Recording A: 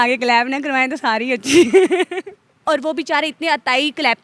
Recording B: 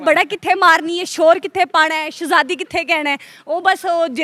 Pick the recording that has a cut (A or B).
A